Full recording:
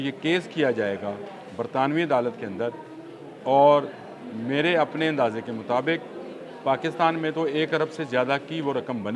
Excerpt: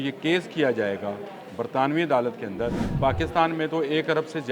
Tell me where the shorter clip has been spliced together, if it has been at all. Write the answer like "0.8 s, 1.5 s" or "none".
2.8 s